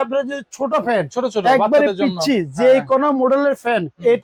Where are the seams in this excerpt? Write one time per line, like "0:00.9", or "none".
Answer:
none